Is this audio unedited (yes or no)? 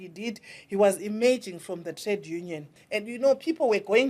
no